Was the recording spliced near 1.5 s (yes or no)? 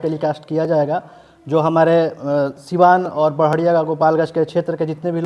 no